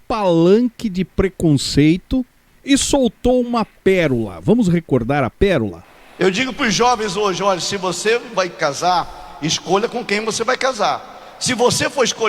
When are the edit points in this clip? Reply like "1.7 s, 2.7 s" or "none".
none